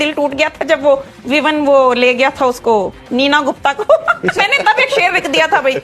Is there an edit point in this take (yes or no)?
yes